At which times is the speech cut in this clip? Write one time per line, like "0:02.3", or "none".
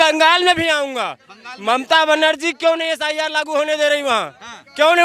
none